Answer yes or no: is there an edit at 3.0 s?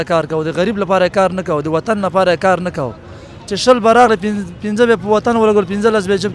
no